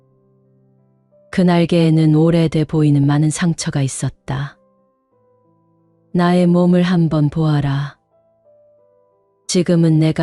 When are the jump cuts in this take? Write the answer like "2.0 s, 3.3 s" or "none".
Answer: 7.9 s, 9.5 s